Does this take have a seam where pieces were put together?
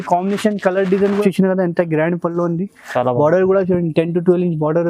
yes; 1 cut; at 1.2 s

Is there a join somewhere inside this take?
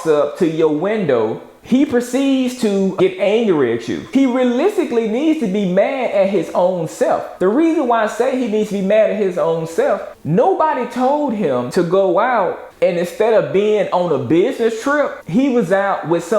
yes; 3 cuts; at 2.9 s, 4.0 s, 7.3 s

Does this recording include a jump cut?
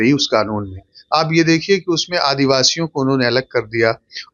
no; 0 cuts

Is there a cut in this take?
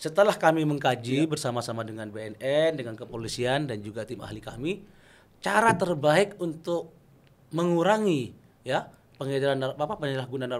no; 0 cuts

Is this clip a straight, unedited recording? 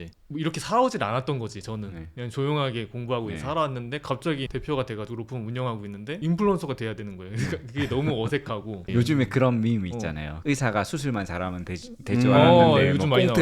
no; 1 cut; at 4.5 s

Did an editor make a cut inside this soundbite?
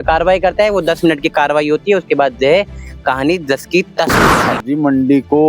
yes; 1 cut; at 4.3 s

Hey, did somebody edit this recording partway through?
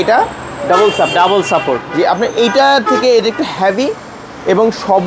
no; 0 cuts

